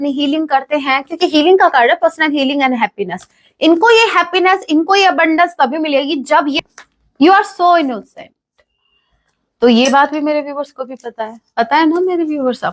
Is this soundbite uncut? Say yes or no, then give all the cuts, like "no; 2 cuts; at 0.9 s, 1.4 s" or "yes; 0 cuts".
no; 1 cut; at 6.6 s